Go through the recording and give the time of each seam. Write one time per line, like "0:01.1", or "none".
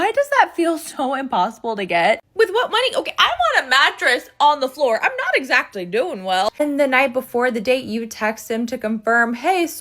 0:02.2
0:06.5